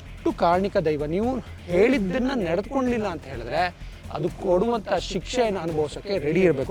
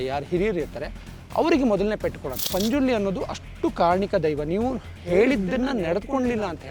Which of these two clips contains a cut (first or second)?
second